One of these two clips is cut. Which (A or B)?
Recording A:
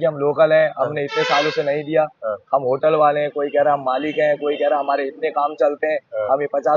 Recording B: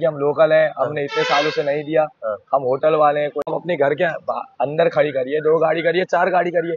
B